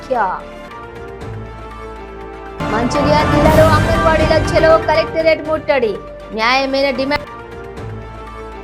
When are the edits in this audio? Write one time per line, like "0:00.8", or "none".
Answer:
0:07.3

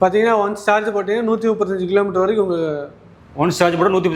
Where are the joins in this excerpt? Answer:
none

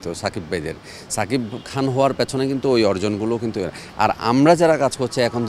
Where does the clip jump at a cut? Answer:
none

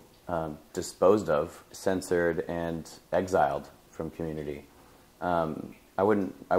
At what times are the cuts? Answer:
none

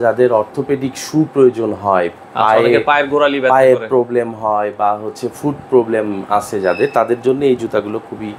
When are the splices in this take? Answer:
none

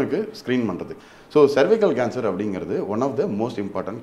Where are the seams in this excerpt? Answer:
0:00.9

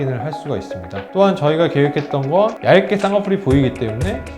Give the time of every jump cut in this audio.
0:02.6

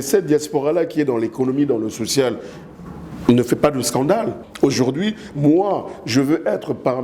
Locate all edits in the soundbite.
0:04.4

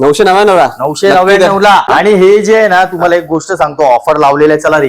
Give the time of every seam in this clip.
0:01.9

